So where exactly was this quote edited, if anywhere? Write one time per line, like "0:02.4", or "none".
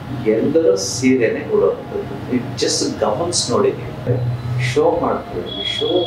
0:04.1